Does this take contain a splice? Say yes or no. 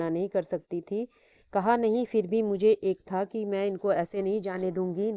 no